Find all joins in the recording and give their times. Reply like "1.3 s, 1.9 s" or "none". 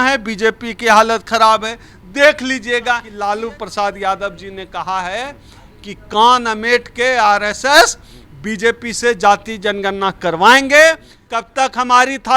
3.1 s, 11.1 s